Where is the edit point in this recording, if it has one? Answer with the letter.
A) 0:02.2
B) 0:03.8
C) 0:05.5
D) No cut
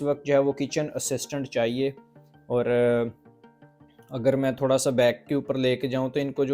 D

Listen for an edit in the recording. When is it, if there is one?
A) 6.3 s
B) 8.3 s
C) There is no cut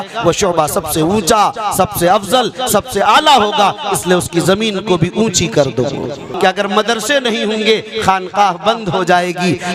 A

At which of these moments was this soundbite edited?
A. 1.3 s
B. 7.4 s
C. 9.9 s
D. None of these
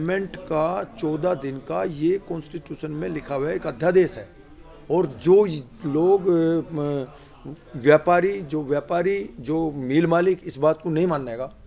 D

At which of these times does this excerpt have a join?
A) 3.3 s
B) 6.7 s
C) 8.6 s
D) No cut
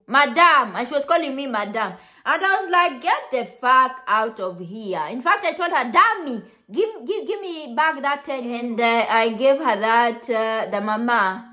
C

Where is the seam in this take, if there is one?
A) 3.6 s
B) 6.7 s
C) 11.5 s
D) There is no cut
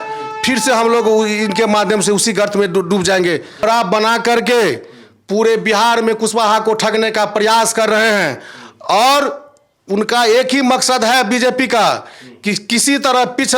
A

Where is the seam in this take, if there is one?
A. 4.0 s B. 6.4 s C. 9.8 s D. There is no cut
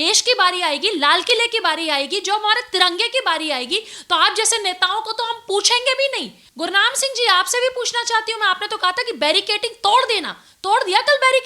B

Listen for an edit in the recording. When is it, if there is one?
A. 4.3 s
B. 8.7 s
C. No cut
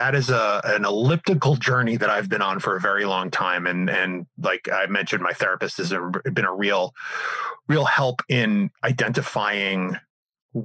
B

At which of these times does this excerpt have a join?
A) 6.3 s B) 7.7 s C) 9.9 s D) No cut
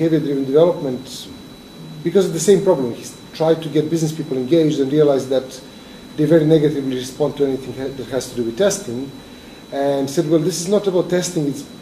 D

